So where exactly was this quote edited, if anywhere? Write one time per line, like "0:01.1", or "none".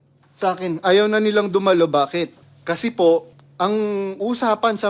0:02.5
0:03.4